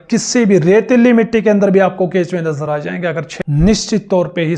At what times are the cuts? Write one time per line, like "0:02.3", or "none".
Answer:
0:03.3